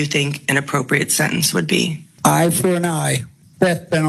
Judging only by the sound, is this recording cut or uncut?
uncut